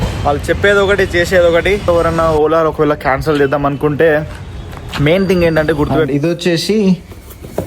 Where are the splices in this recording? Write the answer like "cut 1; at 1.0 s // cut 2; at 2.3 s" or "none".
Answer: cut 1; at 1.9 s // cut 2; at 6.0 s